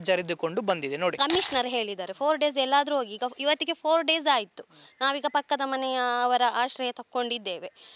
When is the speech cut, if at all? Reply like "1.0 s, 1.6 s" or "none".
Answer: 1.2 s